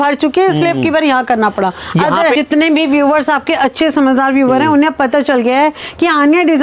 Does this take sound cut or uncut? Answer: cut